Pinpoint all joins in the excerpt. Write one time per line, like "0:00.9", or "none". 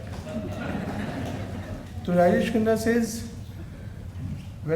0:01.9